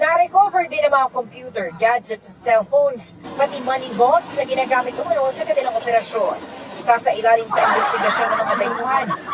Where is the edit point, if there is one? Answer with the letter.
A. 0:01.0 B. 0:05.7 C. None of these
A